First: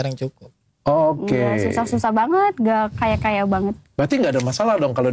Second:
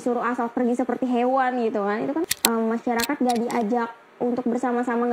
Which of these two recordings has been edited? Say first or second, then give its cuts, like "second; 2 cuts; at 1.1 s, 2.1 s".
second; 1 cut; at 2.3 s